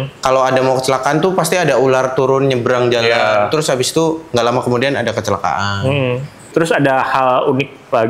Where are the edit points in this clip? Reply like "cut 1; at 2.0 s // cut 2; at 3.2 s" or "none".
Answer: cut 1; at 6.4 s